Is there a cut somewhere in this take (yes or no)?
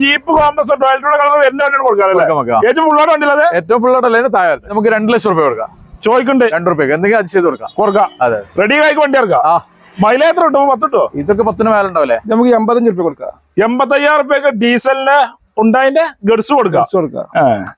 yes